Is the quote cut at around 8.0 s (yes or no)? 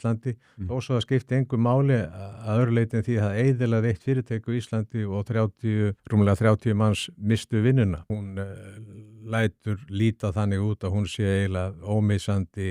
yes